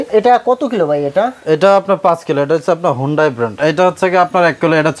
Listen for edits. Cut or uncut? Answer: cut